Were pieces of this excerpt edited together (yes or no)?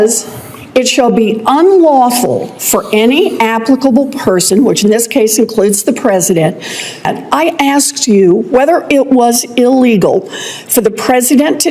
yes